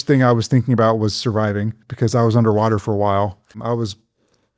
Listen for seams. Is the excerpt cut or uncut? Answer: cut